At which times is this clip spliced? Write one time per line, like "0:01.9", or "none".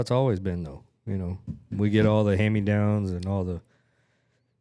none

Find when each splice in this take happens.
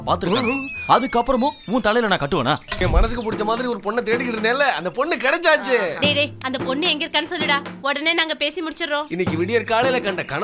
0:02.8

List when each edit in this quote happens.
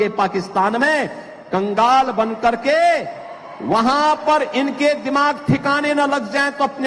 none

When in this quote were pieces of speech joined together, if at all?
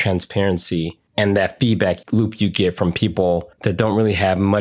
0:01.0
0:02.0
0:03.5

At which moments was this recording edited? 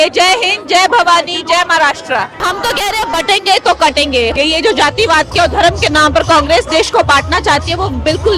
0:02.4
0:04.3

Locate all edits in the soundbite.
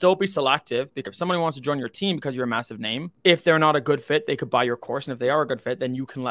0:01.1
0:03.1

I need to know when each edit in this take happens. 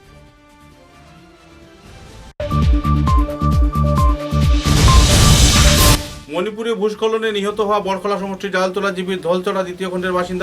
0:02.3
0:06.1

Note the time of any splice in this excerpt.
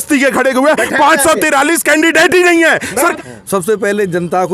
0:03.1

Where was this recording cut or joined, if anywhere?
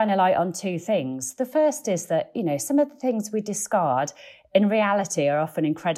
none

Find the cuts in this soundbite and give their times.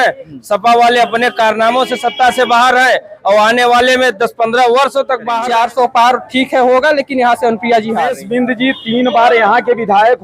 0:05.4
0:08.2

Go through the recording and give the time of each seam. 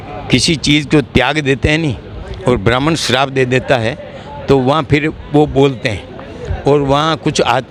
none

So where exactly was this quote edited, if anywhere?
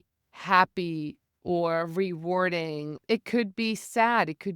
0:02.9

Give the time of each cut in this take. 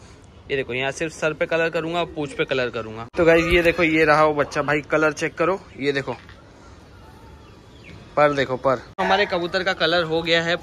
0:03.0
0:09.0

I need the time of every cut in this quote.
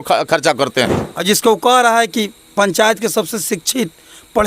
0:01.1

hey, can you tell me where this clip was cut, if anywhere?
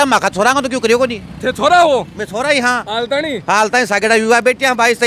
none

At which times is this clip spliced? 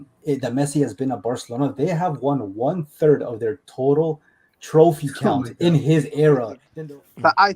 0:06.6

